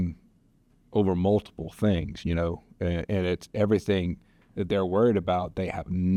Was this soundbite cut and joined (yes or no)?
no